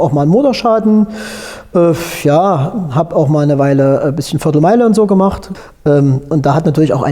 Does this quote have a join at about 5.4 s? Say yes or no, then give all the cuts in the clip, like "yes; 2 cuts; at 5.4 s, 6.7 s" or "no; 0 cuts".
yes; 1 cut; at 5.4 s